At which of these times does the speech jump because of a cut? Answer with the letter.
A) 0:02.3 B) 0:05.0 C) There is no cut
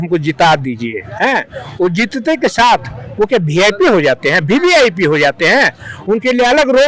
C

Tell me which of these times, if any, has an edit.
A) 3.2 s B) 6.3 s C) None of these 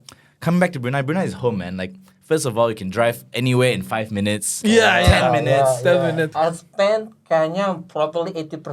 B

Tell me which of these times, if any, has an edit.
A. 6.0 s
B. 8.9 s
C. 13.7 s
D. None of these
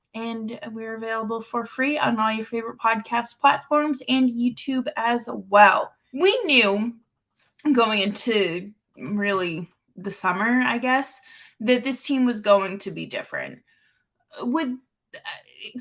A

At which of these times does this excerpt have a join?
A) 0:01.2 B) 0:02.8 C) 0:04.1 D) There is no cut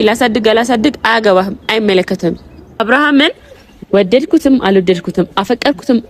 B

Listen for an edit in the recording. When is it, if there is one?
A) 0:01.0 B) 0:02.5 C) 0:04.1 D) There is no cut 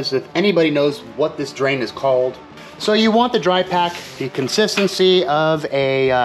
B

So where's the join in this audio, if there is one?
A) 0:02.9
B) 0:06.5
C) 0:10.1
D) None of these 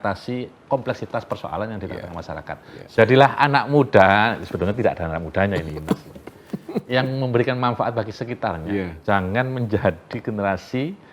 A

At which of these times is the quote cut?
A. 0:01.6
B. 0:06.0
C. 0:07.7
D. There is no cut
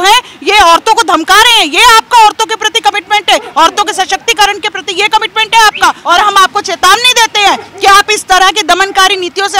B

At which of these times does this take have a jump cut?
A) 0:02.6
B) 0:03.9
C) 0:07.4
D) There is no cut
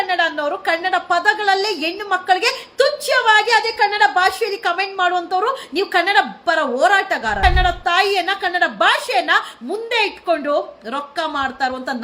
C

